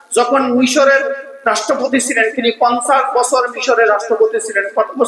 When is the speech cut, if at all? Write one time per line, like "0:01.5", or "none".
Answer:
none